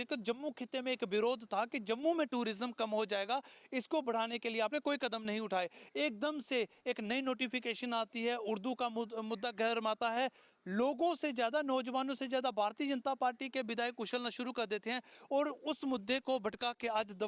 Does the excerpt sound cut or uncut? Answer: uncut